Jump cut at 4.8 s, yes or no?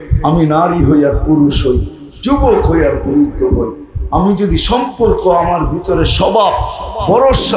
no